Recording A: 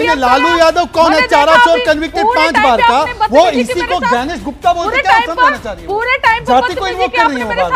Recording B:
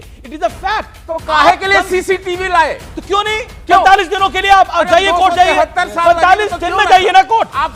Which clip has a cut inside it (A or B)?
B